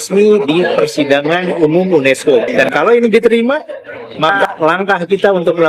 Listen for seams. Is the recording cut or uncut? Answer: cut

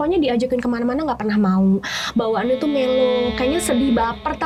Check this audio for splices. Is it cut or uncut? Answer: uncut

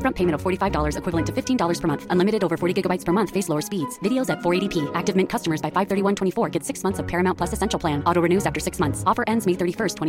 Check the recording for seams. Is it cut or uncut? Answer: uncut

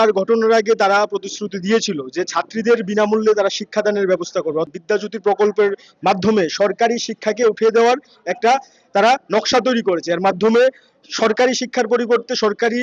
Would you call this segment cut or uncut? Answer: cut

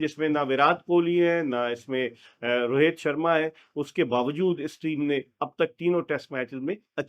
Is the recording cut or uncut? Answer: uncut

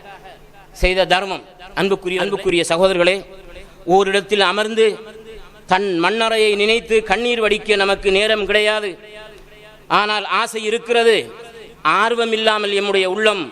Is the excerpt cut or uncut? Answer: cut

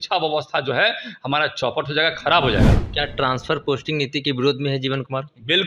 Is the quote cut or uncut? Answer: uncut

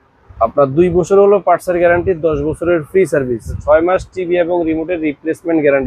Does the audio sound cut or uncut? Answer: cut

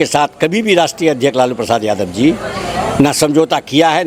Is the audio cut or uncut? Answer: uncut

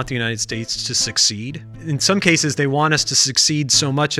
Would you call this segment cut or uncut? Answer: cut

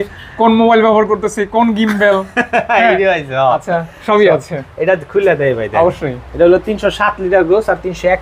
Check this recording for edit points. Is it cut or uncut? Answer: uncut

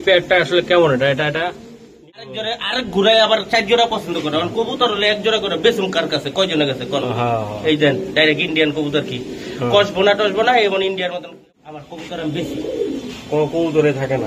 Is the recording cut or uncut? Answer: cut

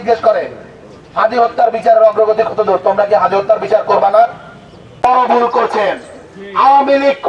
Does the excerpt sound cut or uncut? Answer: cut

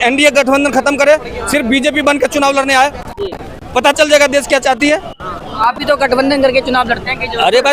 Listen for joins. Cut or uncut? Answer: uncut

